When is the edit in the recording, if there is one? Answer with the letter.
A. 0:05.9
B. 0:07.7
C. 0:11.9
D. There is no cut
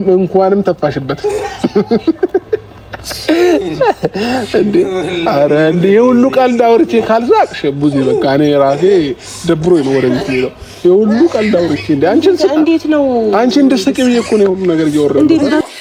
D